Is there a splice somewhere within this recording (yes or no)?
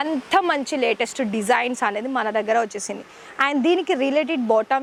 no